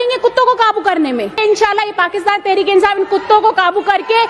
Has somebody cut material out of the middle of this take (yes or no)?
yes